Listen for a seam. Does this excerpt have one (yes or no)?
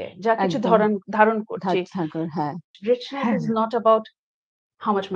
yes